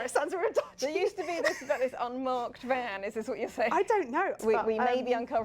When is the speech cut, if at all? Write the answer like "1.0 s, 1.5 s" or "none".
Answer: 4.4 s